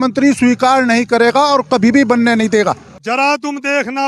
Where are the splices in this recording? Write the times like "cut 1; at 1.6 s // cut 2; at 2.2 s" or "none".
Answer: cut 1; at 2.9 s